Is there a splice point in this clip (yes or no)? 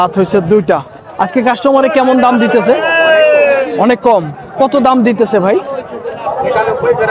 no